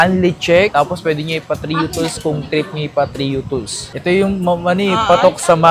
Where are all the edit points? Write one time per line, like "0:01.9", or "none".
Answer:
0:03.9